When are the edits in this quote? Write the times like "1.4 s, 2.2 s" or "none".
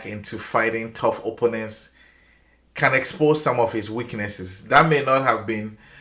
none